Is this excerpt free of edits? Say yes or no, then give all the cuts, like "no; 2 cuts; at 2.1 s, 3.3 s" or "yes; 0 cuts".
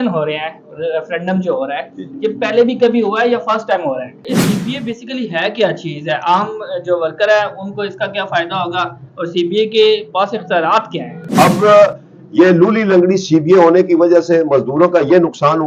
no; 2 cuts; at 4.3 s, 11.2 s